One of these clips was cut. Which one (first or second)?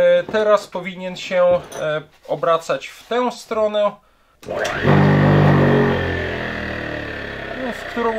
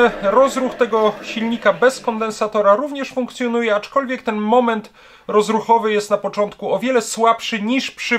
first